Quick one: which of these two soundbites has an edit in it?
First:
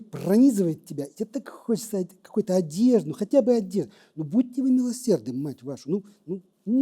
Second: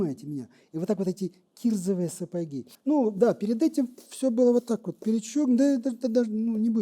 second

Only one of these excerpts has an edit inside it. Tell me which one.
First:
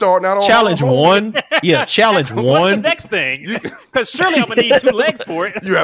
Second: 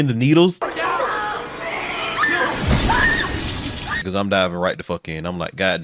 second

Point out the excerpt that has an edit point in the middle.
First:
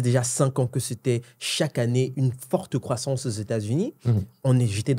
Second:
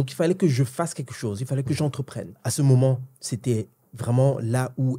second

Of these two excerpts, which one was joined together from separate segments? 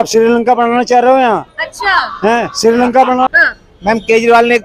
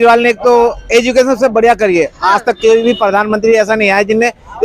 first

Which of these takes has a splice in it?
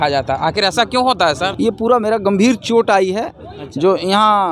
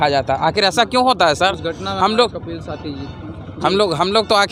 first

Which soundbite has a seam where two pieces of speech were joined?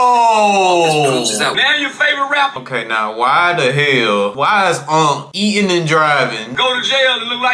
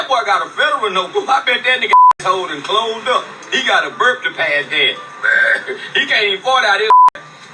first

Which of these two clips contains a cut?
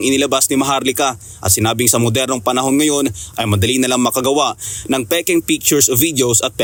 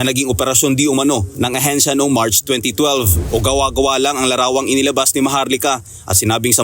second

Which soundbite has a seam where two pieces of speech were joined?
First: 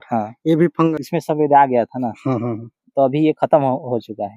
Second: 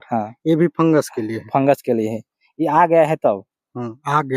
first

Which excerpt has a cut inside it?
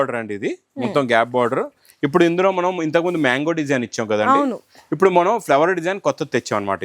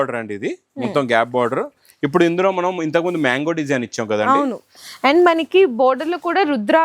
second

